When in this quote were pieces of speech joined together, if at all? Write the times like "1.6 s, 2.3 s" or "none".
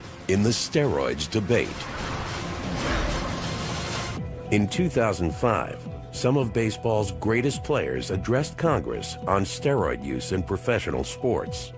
9.9 s